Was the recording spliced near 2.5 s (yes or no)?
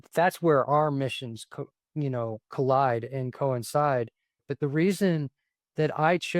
no